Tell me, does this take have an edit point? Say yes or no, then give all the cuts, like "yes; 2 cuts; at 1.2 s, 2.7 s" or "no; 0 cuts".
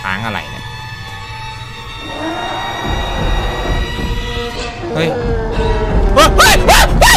no; 0 cuts